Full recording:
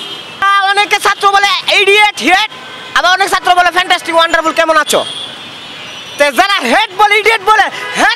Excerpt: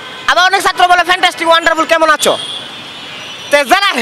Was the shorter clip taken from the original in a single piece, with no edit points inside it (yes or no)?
yes